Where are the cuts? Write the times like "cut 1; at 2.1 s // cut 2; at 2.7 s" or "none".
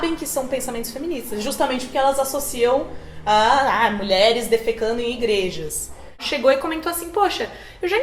cut 1; at 6.2 s